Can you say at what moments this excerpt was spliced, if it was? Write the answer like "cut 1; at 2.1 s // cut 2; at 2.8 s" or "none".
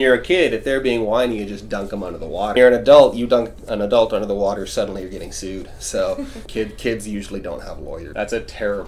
cut 1; at 2.6 s // cut 2; at 6.4 s // cut 3; at 8.1 s